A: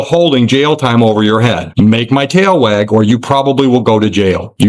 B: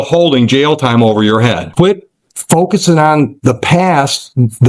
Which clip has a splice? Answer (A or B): B